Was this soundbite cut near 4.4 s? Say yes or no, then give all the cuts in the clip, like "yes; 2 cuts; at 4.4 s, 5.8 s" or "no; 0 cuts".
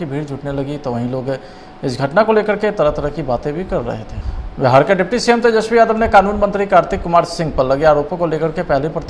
yes; 1 cut; at 4.4 s